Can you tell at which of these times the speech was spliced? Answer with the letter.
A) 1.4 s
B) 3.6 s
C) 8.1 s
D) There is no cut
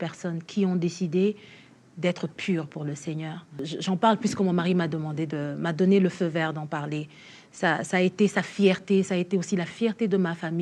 B